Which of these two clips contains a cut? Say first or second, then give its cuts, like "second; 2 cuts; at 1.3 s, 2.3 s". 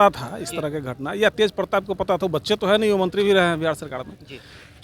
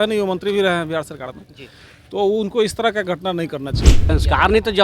second; 1 cut; at 3.9 s